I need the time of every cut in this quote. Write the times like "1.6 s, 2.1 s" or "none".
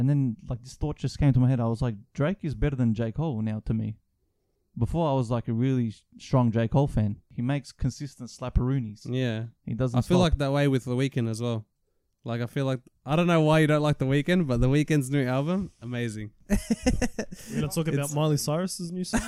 7.2 s, 16.3 s